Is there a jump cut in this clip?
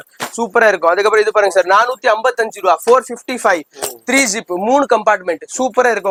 no; 0 cuts

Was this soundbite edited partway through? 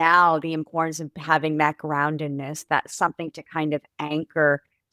no; 0 cuts

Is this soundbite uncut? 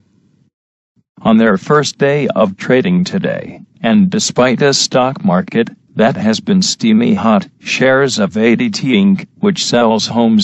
yes; 0 cuts

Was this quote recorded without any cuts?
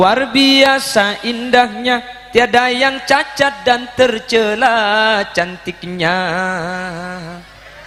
yes; 0 cuts

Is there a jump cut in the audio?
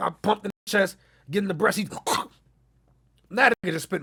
no; 0 cuts

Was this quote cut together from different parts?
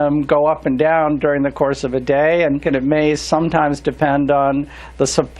yes; 1 cut; at 2.6 s

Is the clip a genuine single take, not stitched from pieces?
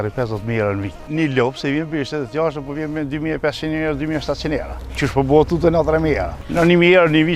no; 1 cut; at 1.0 s

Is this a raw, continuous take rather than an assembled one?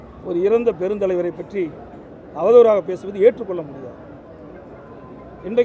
yes; 0 cuts

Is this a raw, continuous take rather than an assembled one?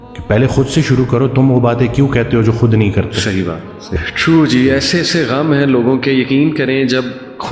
no; 1 cut; at 3.9 s

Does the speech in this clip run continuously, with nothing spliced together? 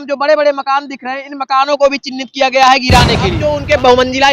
no; 1 cut; at 3.3 s

